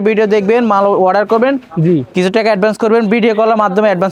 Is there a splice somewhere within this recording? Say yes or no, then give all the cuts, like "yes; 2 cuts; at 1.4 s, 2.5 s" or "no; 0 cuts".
no; 0 cuts